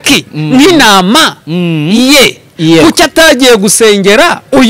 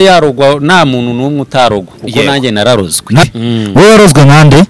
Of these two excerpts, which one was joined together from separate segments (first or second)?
second